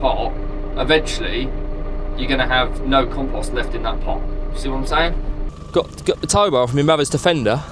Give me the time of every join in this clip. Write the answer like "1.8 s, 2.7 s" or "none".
5.4 s